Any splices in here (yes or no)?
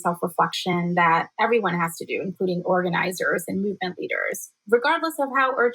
no